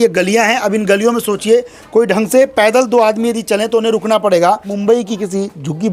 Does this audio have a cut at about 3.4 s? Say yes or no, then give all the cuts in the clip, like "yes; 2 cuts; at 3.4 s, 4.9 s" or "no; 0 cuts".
no; 1 cut; at 4.7 s